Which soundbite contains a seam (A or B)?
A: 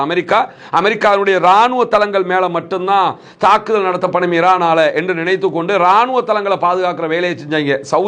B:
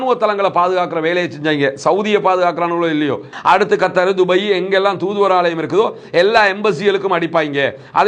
B